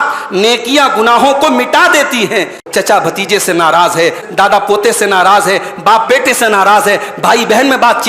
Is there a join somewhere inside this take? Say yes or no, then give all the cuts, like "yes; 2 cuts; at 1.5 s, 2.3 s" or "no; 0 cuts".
yes; 2 cuts; at 2.6 s, 4.2 s